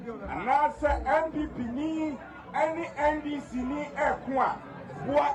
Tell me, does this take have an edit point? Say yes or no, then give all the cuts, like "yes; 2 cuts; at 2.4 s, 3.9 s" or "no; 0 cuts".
no; 0 cuts